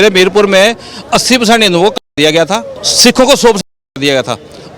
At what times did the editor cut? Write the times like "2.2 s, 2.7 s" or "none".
2.8 s